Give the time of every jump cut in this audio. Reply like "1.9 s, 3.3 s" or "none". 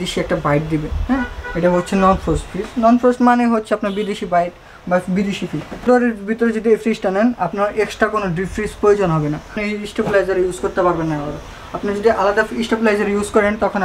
5.9 s, 9.6 s